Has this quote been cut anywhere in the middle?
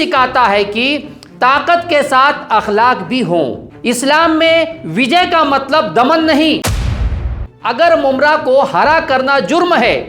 yes; 2 cuts; at 3.7 s, 7.1 s

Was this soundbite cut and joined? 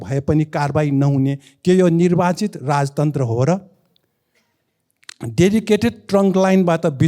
no; 0 cuts

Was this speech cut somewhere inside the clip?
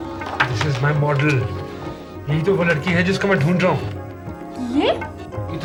no; 0 cuts

